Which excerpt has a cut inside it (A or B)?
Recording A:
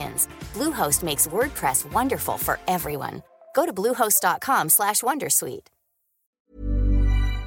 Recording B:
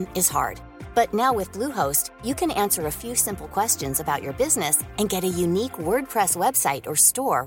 A